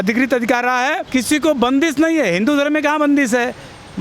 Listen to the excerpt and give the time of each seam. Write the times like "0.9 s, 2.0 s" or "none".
1.0 s